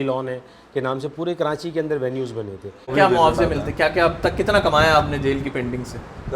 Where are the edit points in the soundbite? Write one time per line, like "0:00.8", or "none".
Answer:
0:02.9